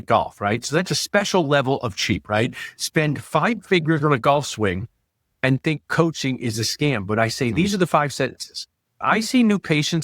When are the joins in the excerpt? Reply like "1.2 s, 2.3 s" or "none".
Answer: 9.0 s